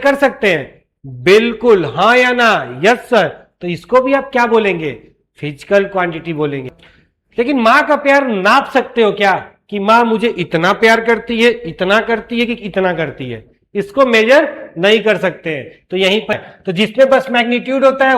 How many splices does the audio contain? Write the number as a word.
two